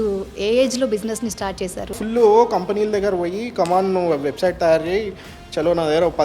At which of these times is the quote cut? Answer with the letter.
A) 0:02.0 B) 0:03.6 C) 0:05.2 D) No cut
A